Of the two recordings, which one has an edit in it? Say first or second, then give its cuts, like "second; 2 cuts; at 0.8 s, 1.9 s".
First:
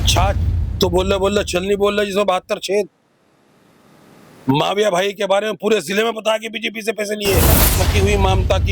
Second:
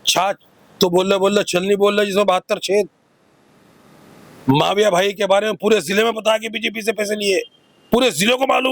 first; 1 cut; at 7.7 s